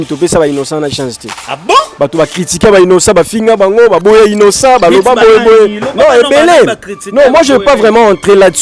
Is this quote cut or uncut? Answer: uncut